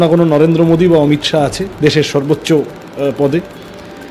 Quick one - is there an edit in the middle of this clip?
no; 0 cuts

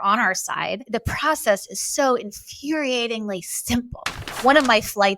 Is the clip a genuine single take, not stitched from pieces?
no; 2 cuts; at 0.8 s, 4.2 s

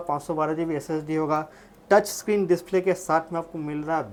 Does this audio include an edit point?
no; 0 cuts

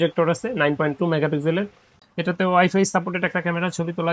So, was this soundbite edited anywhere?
yes; 1 cut; at 1.9 s

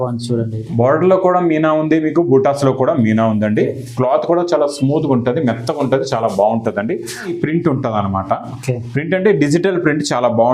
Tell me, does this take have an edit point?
yes; 1 cut; at 7.3 s

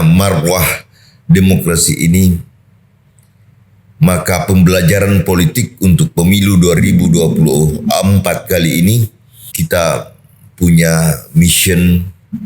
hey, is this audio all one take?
no; 1 cut; at 9.4 s

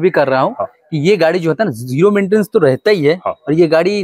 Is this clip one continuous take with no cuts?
yes; 0 cuts

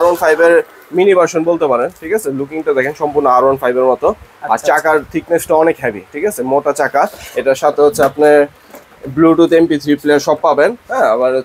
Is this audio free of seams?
yes; 0 cuts

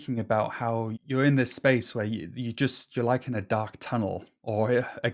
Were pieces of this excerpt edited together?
yes; 1 cut; at 1.0 s

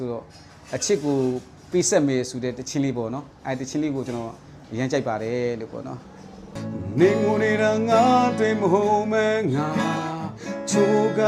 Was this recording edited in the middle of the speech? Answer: no; 0 cuts

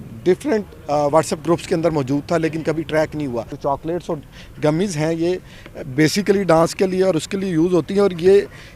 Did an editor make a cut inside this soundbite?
yes; 1 cut; at 3.5 s

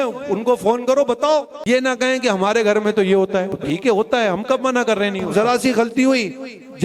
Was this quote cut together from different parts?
yes; 3 cuts; at 1.5 s, 3.6 s, 5.3 s

